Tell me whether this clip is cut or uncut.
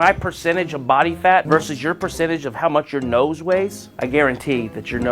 cut